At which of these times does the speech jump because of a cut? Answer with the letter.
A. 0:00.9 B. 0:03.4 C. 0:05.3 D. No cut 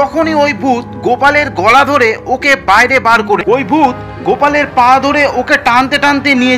B